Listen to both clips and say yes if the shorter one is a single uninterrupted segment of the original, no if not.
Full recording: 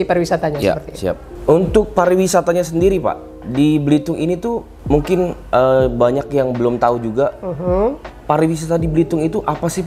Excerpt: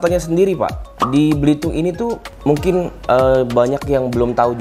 yes